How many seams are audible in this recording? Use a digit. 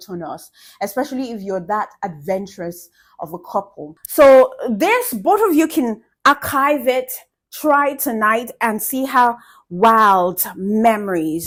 0